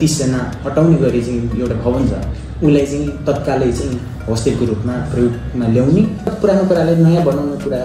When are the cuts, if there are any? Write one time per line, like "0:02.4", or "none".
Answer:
0:06.3